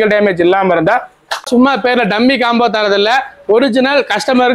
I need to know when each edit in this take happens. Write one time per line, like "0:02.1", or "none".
0:01.4